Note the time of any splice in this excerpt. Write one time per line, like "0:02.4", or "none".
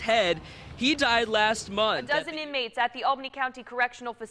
0:02.5